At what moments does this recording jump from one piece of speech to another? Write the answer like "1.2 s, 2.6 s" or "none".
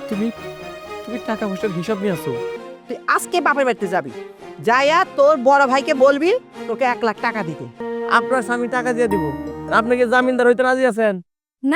2.6 s, 7.8 s

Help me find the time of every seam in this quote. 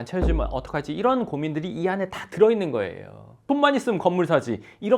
3.3 s

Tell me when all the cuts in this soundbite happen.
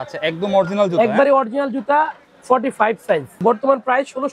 3.4 s

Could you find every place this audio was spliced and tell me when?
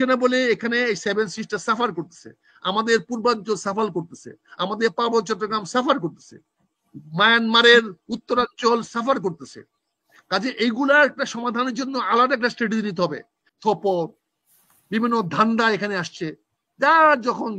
13.5 s

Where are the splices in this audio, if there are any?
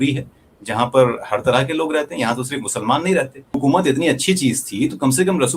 3.6 s

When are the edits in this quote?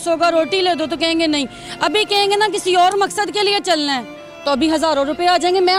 none

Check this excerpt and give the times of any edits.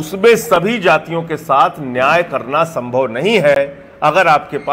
none

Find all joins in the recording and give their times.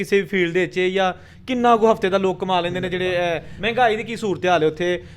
3.5 s

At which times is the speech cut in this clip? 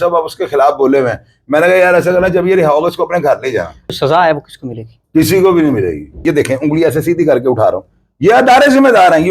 3.9 s, 6.2 s

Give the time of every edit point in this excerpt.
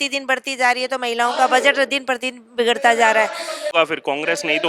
3.7 s

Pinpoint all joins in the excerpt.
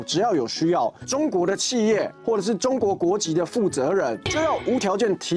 none

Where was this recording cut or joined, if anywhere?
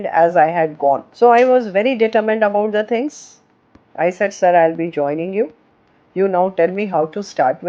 1.1 s

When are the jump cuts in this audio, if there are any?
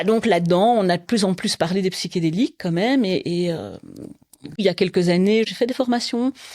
4.6 s, 5.5 s

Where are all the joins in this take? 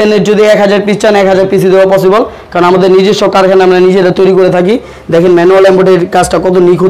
none

